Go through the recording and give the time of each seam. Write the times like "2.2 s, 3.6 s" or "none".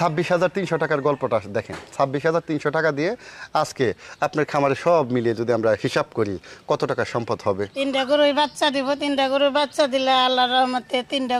7.7 s